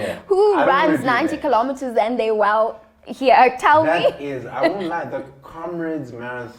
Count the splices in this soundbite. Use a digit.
0